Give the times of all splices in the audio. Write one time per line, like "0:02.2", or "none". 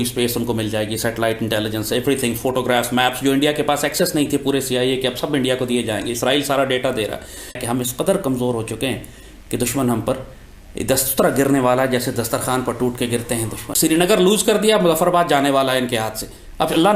0:07.6
0:13.6